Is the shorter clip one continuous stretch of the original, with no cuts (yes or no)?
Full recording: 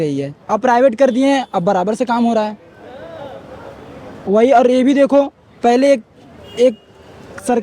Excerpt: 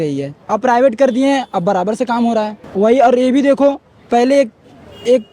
no